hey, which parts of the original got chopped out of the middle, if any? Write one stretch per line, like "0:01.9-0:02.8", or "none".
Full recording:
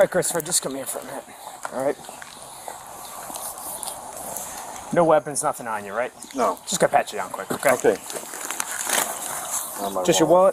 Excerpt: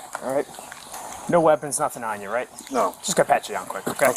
0:02.4-0:04.5